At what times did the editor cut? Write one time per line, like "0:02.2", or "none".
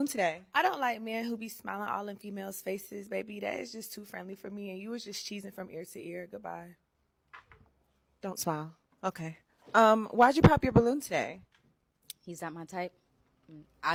none